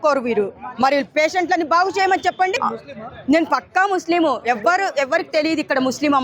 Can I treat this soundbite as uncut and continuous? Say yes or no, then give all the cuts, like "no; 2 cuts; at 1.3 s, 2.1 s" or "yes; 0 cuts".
no; 1 cut; at 2.5 s